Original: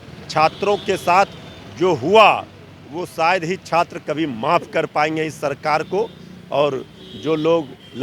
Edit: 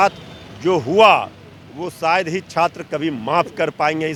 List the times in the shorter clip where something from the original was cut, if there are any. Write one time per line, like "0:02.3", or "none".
none